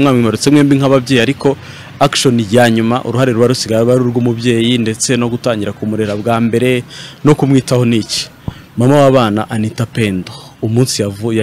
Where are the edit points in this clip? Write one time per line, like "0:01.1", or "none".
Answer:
none